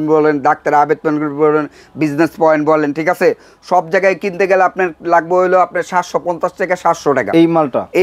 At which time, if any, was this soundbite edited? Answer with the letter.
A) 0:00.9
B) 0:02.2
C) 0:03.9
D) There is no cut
D